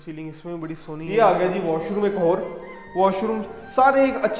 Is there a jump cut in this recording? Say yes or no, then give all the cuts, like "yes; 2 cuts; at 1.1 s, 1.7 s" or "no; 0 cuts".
yes; 1 cut; at 1.1 s